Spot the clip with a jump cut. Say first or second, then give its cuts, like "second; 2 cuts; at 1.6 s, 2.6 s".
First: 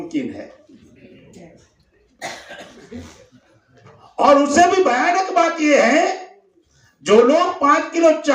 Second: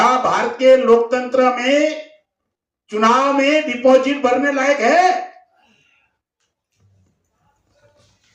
first; 1 cut; at 3.2 s